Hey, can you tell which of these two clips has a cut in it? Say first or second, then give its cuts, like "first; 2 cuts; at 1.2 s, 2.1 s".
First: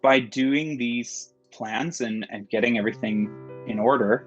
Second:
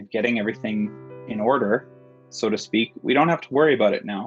first; 1 cut; at 1.5 s